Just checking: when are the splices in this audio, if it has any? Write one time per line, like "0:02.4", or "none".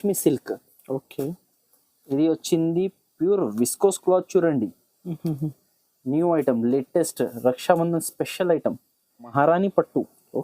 0:09.3